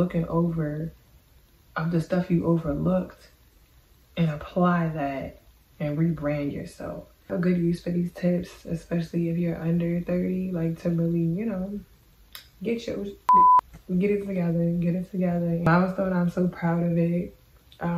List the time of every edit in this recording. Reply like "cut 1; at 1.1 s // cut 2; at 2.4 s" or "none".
cut 1; at 7.3 s // cut 2; at 15.7 s